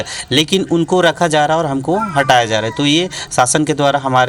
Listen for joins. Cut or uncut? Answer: uncut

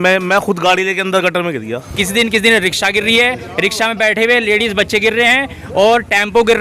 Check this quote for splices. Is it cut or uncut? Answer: cut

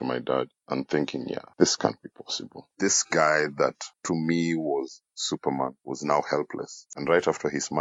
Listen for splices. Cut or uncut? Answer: cut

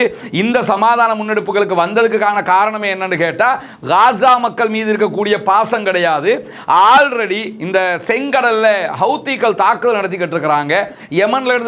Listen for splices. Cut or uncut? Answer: uncut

